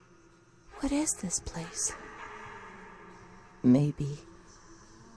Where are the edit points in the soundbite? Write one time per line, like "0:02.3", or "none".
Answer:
none